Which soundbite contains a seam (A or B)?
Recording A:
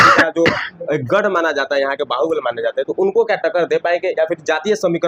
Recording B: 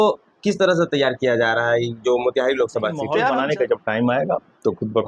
B